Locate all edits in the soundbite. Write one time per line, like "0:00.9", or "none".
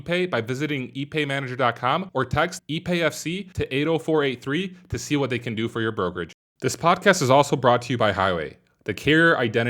0:06.4